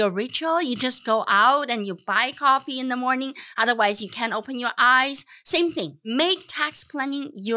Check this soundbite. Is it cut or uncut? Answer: cut